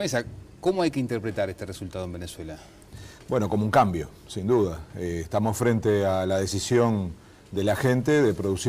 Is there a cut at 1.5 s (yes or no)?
yes